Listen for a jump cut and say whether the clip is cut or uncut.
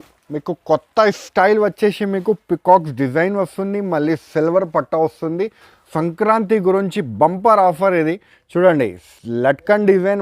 cut